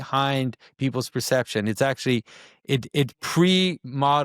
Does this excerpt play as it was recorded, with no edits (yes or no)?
yes